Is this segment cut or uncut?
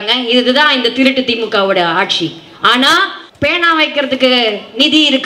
cut